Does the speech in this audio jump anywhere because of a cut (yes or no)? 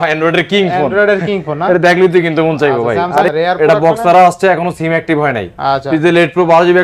yes